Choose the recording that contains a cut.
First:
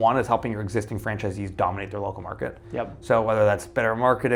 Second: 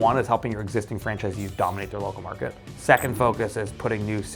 second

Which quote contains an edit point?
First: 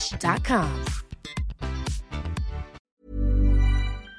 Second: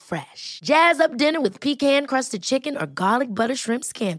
first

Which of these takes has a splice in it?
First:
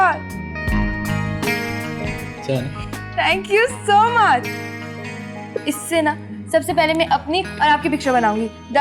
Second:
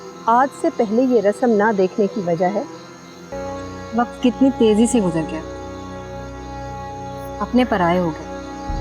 second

